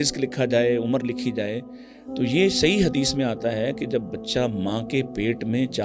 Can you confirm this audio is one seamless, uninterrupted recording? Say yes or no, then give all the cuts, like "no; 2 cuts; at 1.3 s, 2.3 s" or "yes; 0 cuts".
yes; 0 cuts